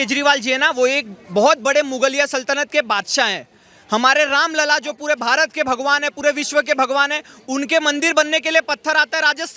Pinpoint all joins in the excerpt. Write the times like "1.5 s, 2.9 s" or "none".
none